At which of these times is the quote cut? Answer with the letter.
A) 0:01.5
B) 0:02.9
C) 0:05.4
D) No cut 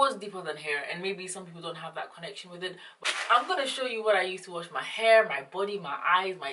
B